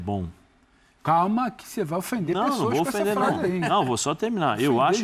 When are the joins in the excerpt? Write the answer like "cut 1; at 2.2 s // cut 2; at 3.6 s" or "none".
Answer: none

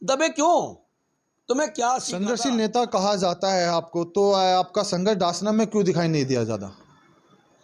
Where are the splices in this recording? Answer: cut 1; at 2.1 s

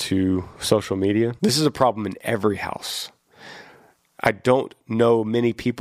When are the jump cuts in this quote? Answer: cut 1; at 1.3 s

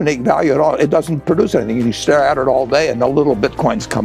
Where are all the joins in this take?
none

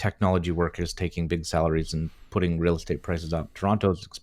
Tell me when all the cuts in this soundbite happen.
none

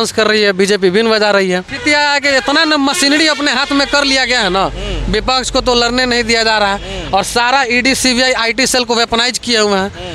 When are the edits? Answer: cut 1; at 1.7 s

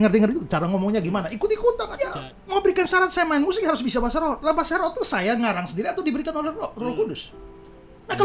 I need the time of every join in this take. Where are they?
cut 1; at 1.9 s

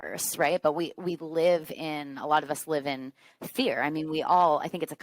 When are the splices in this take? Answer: none

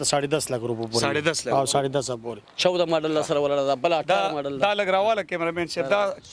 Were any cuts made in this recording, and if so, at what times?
cut 1; at 2.4 s

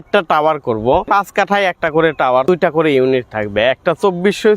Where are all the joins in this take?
cut 1; at 1.1 s // cut 2; at 2.5 s

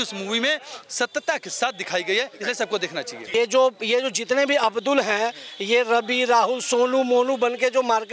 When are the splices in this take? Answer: cut 1; at 3.1 s

